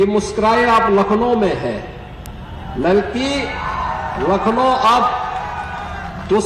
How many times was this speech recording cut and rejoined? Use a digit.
0